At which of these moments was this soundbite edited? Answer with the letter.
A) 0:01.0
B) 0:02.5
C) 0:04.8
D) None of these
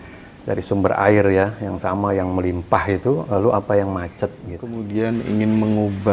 C